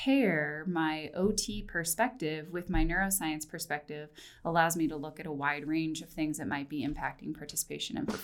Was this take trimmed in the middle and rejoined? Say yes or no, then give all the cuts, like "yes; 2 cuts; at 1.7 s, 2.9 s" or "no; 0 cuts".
no; 0 cuts